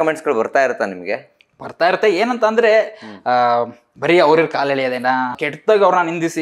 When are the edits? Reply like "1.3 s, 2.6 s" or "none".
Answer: 5.4 s